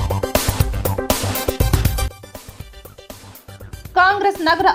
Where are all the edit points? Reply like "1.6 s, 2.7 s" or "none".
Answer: none